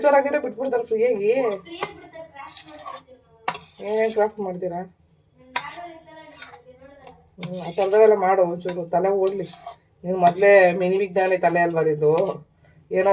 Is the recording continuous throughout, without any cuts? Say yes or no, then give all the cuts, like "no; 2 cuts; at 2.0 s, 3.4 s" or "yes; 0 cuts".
yes; 0 cuts